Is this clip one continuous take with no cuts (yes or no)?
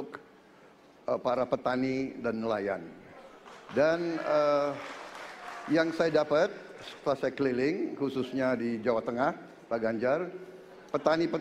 yes